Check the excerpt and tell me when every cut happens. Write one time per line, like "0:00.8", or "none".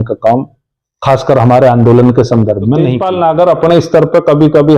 0:03.0